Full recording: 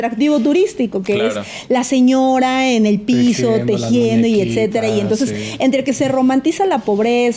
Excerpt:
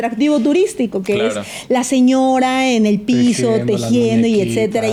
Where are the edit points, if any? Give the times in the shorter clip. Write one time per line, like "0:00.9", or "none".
none